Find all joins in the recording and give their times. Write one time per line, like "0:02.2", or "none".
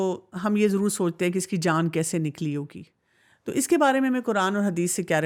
none